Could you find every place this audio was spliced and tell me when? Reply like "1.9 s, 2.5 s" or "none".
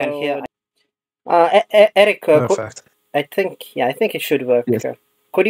none